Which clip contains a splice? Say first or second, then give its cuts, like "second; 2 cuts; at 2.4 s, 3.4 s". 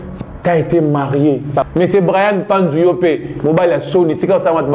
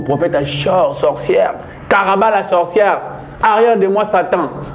first; 1 cut; at 1.7 s